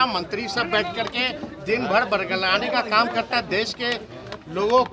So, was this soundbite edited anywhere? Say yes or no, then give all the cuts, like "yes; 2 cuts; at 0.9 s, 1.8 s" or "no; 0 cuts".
no; 0 cuts